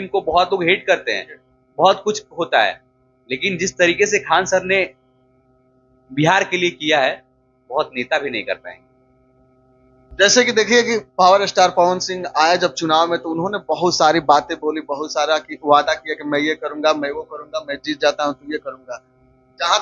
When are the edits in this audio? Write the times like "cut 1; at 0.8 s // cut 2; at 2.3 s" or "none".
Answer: none